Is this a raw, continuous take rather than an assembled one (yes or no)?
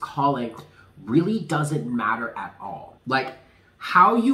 no